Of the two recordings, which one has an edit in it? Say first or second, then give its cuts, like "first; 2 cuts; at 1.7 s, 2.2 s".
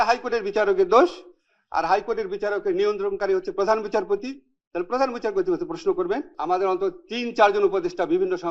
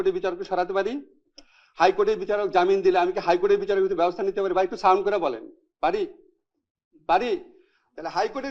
first; 1 cut; at 6.3 s